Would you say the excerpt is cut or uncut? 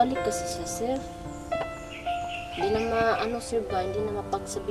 uncut